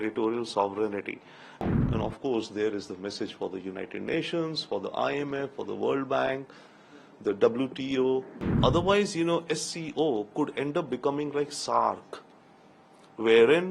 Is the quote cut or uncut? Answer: cut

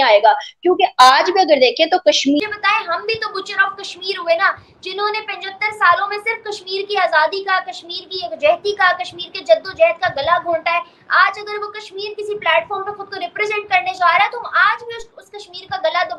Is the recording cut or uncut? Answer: cut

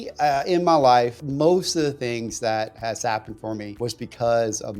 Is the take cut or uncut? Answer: cut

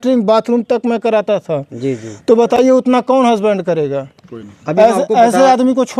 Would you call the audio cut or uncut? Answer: uncut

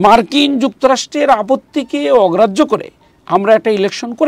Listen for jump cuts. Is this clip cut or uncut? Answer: uncut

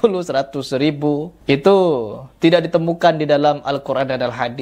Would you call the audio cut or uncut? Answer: uncut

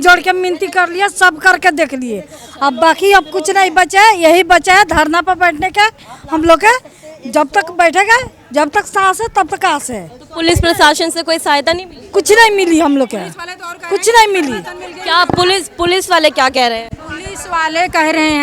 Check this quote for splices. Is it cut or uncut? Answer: uncut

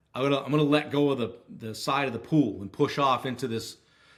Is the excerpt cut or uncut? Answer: uncut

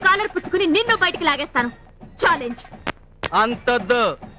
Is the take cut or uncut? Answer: uncut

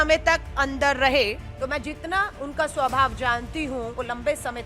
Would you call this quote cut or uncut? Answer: cut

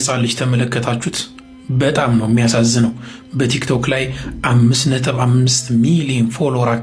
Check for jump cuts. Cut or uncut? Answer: uncut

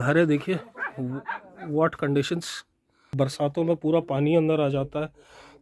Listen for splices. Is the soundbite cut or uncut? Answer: cut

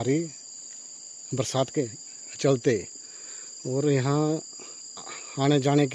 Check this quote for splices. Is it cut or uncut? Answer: uncut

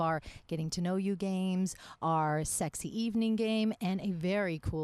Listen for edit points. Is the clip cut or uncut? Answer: uncut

